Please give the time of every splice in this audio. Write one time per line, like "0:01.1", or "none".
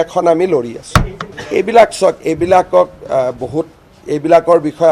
none